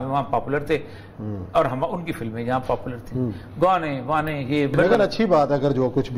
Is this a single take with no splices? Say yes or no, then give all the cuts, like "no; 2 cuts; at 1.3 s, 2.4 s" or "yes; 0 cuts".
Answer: no; 1 cut; at 4.8 s